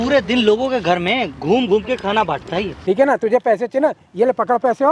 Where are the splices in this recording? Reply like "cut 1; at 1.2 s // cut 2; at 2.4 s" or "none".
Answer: cut 1; at 2.7 s